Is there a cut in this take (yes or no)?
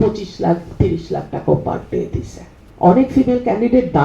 yes